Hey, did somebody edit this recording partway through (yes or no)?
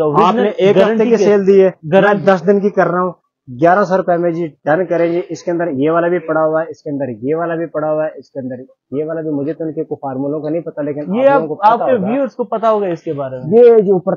no